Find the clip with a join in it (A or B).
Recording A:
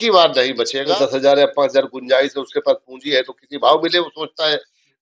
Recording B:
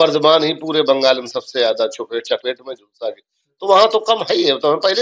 A